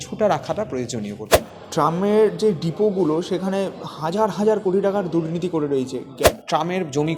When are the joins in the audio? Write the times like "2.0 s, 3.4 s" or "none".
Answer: 1.3 s, 6.3 s